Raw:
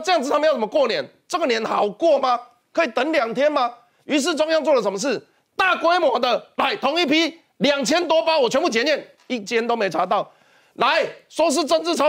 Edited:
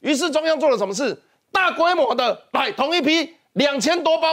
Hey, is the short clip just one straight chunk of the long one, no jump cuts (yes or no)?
yes